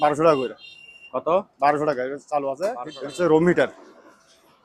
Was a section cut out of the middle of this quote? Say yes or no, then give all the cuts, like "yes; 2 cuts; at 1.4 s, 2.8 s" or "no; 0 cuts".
yes; 1 cut; at 2.8 s